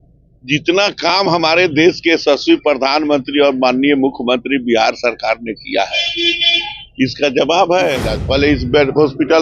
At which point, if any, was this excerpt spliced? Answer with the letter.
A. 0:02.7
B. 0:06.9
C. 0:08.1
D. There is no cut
C